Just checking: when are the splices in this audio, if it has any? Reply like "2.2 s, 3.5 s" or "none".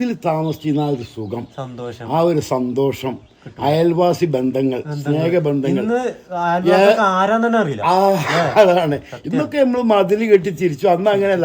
none